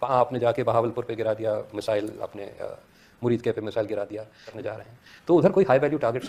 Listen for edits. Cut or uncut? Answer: cut